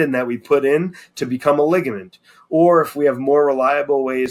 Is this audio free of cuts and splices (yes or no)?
yes